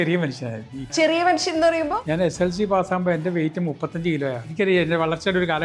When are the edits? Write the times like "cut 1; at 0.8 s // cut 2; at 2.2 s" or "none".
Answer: cut 1; at 0.9 s // cut 2; at 2.0 s // cut 3; at 4.5 s